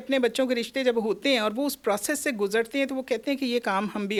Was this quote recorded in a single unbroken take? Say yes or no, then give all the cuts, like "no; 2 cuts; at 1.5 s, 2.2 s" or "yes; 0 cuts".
yes; 0 cuts